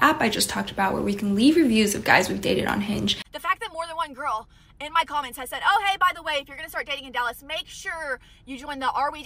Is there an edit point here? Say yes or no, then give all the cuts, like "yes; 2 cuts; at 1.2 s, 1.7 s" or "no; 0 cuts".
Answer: yes; 1 cut; at 3.3 s